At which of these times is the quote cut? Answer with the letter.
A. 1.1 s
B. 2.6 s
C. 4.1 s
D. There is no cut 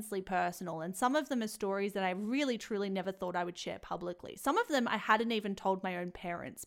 D